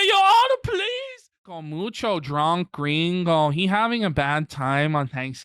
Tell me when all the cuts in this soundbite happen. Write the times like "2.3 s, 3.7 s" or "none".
1.6 s